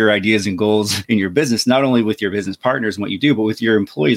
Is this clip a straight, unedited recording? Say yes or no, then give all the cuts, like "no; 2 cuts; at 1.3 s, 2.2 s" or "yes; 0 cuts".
no; 1 cut; at 1.0 s